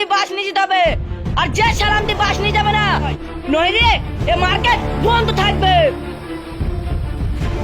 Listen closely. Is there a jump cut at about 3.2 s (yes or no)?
yes